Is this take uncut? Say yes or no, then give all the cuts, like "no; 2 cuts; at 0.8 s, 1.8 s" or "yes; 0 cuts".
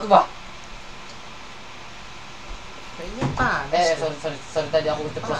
yes; 0 cuts